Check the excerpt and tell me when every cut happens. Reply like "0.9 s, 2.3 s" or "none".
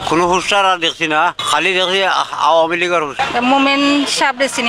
none

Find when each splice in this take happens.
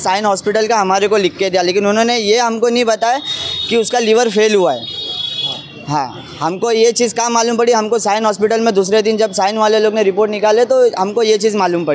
none

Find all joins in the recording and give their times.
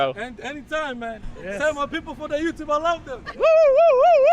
none

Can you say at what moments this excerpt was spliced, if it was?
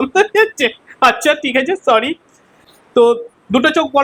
none

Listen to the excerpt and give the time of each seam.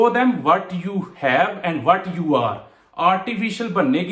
none

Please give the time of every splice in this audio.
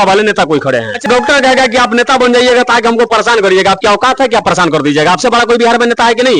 1.1 s

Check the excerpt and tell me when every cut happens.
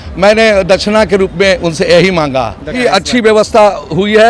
2.7 s

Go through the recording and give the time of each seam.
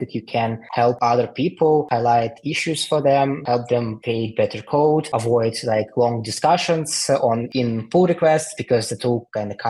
none

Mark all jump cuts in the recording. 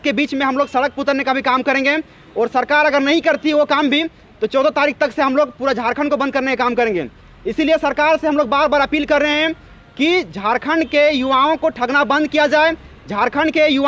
none

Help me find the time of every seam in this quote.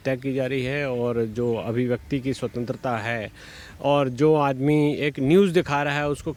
none

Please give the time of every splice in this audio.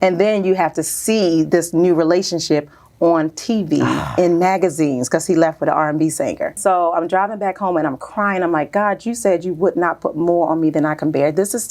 6.6 s

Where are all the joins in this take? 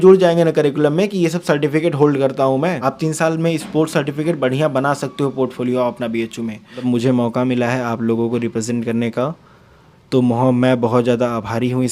2.8 s, 6.8 s

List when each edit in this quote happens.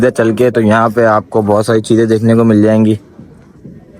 none

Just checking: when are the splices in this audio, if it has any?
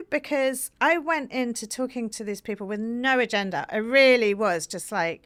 none

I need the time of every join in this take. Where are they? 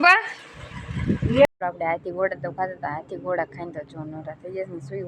1.4 s

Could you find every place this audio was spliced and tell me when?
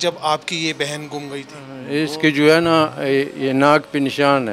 1.8 s

